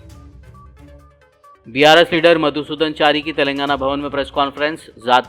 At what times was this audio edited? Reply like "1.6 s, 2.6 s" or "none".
1.0 s